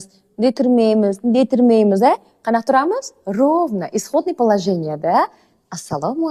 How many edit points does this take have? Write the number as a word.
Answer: zero